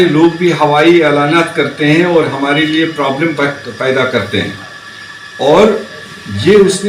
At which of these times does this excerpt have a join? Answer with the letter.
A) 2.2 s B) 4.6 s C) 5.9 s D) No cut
D